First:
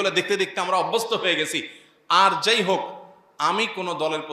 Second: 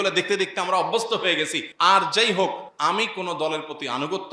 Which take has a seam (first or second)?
second